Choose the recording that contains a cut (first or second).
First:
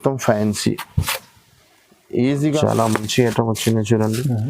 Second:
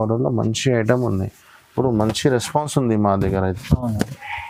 first